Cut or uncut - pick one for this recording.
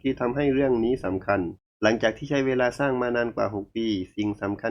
cut